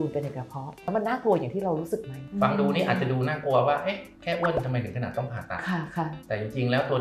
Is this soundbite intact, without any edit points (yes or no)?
no